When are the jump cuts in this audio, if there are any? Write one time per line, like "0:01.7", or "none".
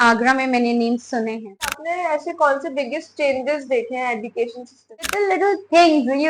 0:01.8
0:05.1